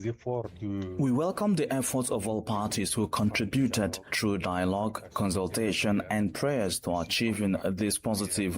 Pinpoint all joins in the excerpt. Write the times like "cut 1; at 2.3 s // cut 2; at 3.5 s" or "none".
cut 1; at 4.0 s